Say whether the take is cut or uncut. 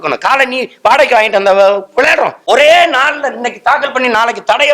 cut